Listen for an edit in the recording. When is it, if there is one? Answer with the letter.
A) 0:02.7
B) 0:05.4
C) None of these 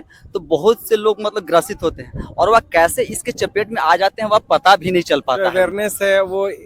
B